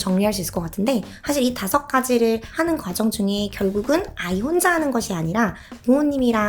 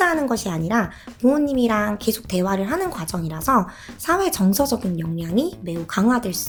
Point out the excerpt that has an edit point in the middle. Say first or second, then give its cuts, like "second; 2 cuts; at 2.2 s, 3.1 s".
first; 2 cuts; at 1.1 s, 2.5 s